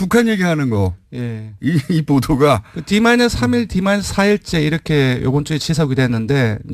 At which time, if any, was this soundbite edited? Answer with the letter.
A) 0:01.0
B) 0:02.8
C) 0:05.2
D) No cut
C